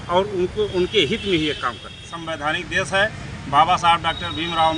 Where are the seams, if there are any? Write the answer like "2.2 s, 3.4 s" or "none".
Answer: 1.7 s